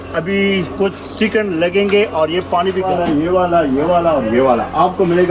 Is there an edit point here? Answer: yes; 1 cut; at 2.9 s

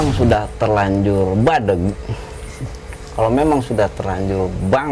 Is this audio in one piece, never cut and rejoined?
yes; 0 cuts

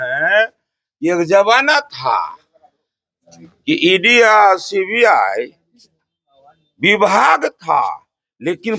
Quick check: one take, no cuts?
yes; 0 cuts

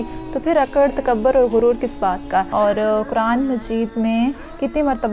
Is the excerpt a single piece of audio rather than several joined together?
no; 1 cut; at 2.5 s

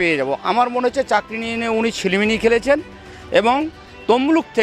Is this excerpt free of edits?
yes; 0 cuts

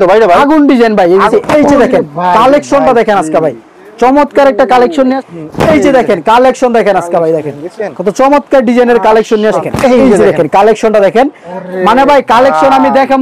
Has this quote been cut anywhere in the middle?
yes; 3 cuts; at 1.3 s, 5.2 s, 9.6 s

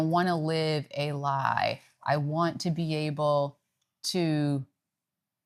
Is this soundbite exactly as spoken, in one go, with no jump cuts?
yes; 0 cuts

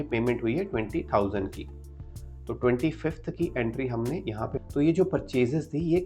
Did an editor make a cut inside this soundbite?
yes; 1 cut; at 4.6 s

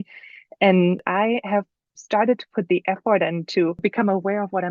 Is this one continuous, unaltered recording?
no; 2 cuts; at 1.0 s, 3.8 s

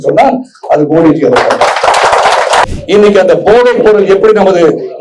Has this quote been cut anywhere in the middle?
yes; 1 cut; at 2.7 s

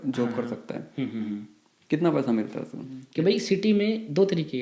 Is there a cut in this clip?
yes; 1 cut; at 3.0 s

